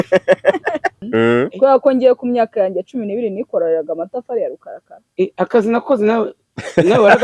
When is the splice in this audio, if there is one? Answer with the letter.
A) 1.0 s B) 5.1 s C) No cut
A